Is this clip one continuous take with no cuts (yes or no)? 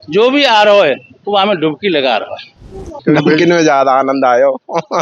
no